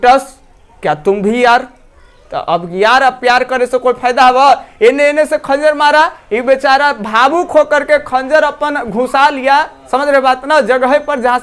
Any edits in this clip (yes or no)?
no